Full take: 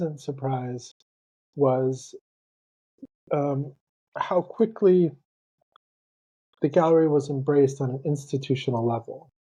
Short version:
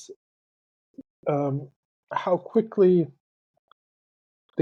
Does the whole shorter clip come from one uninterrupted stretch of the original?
yes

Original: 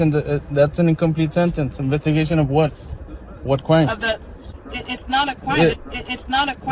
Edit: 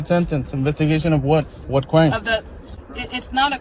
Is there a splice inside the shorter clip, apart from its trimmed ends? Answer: yes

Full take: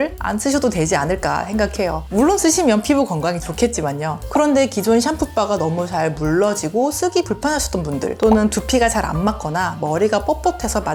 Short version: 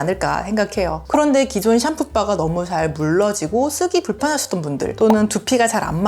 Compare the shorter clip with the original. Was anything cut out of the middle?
yes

